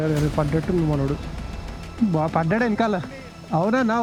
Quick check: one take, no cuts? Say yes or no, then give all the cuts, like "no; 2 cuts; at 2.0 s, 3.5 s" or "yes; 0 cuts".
yes; 0 cuts